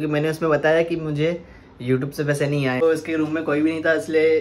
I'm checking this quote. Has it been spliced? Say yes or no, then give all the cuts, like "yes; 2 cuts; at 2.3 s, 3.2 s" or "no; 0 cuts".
yes; 1 cut; at 2.8 s